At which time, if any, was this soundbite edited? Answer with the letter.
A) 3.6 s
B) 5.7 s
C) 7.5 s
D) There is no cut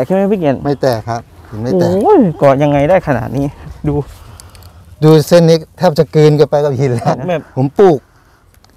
C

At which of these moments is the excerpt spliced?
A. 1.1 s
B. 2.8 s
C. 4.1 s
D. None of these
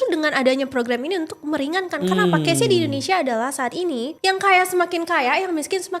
C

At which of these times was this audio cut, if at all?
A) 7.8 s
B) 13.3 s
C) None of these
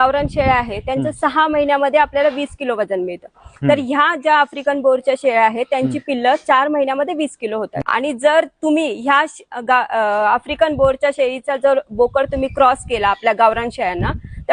A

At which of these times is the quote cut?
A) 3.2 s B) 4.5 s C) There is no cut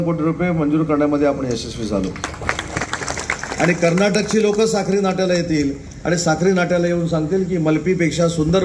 A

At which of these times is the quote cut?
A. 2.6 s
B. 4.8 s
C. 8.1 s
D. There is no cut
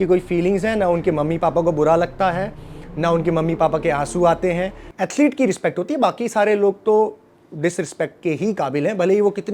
B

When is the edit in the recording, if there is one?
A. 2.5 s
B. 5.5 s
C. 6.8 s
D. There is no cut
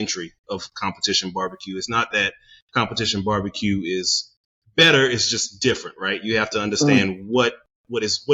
D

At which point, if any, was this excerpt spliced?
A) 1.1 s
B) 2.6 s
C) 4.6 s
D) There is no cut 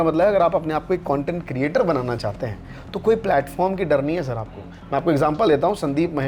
D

